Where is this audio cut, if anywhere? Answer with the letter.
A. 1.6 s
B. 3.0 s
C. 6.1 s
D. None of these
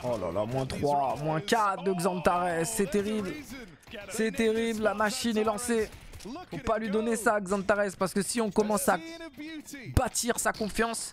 D